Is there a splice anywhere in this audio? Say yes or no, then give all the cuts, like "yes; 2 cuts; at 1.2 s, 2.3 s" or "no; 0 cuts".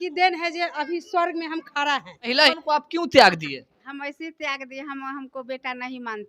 yes; 1 cut; at 2.4 s